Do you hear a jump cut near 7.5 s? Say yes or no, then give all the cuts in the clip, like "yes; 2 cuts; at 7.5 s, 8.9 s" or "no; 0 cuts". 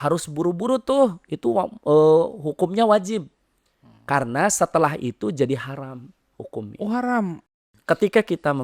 yes; 1 cut; at 7.5 s